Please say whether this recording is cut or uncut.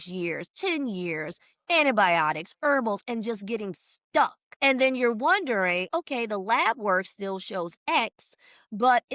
cut